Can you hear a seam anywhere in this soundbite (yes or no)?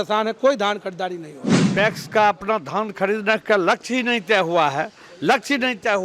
yes